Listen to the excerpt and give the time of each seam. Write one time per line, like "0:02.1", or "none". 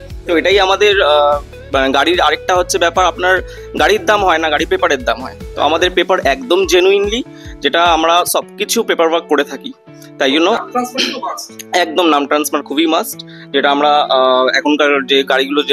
none